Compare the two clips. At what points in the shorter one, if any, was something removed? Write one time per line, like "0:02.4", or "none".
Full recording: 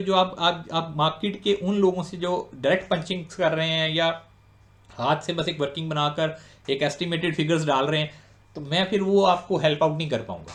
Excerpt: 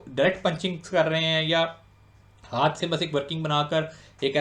none

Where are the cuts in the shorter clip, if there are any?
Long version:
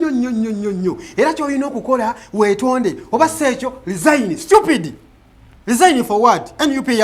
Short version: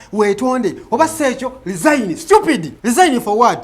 0:02.7

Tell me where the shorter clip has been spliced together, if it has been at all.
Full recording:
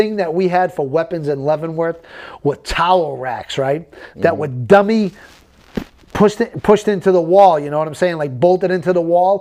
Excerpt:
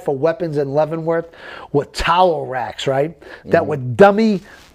none

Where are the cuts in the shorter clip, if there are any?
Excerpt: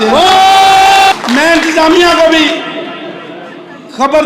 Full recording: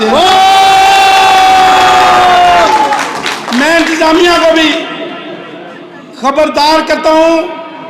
0:01.1

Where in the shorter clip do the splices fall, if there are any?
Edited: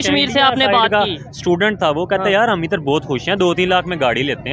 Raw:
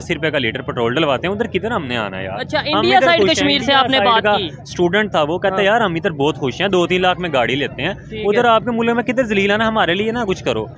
none

